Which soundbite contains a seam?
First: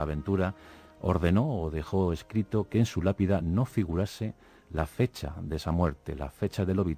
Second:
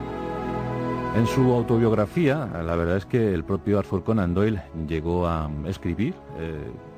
first; 1 cut; at 2.5 s

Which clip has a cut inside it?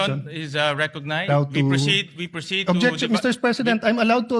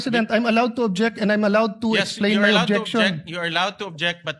first; 1 cut; at 1.3 s

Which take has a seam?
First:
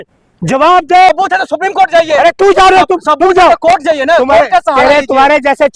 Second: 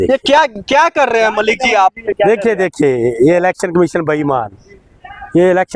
first; 1 cut; at 1.1 s

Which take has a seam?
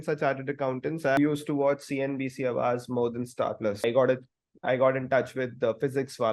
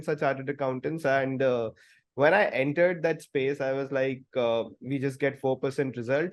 first; 2 cuts; at 1.2 s, 3.8 s

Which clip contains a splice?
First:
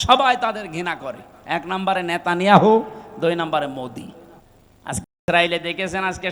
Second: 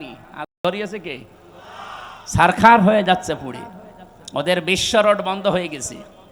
first; 1 cut; at 4.4 s

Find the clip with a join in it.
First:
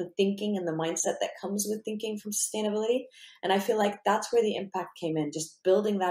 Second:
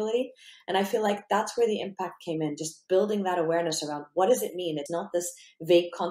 second; 1 cut; at 4.8 s

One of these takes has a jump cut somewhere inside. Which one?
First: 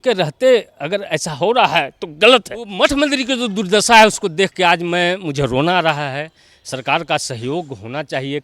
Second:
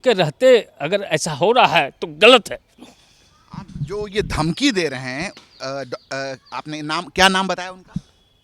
first; 1 cut; at 2.7 s

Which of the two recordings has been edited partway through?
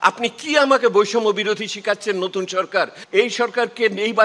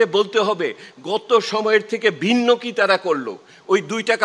first; 1 cut; at 3.0 s

